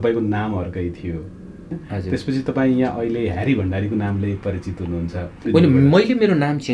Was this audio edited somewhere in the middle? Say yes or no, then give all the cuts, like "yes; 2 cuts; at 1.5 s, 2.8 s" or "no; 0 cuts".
yes; 2 cuts; at 1.8 s, 5.5 s